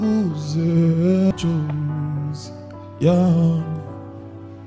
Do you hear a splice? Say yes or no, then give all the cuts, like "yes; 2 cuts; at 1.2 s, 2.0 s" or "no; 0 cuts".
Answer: yes; 1 cut; at 1.3 s